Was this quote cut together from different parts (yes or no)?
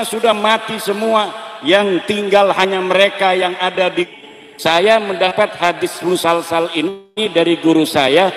yes